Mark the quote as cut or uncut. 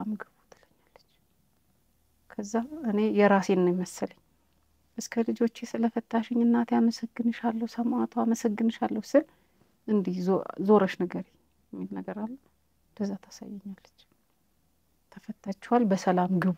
uncut